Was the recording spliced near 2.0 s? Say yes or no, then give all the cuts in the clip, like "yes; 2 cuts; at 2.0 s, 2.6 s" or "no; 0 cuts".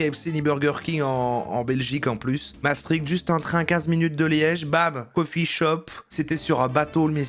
no; 0 cuts